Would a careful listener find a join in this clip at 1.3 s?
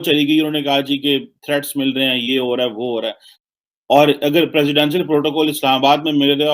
no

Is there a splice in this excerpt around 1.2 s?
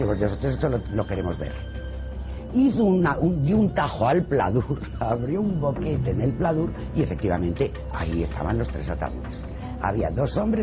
no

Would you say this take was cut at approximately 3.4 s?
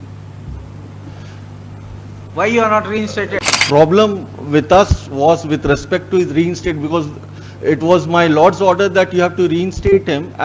yes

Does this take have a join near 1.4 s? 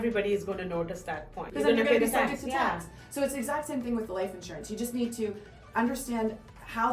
yes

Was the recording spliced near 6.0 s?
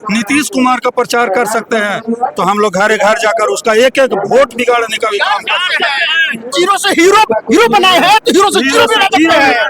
no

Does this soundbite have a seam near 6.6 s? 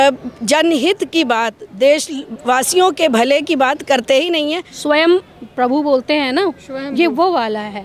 no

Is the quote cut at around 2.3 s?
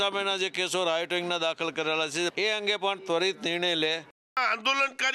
yes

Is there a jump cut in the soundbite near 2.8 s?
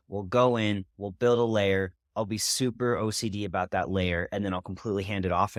no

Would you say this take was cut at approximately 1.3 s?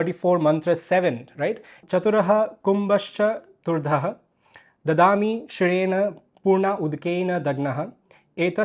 no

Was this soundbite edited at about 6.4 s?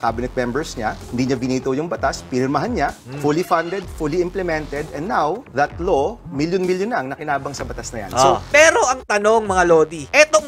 no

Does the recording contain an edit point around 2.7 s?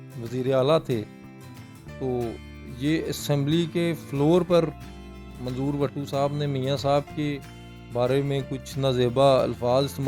no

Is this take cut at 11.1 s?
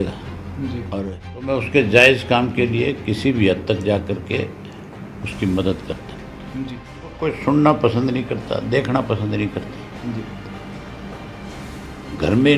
no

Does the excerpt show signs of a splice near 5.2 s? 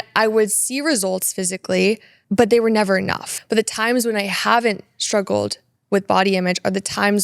no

